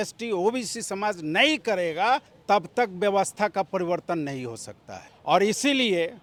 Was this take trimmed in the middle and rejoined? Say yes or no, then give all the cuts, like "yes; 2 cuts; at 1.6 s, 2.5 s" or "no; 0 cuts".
no; 0 cuts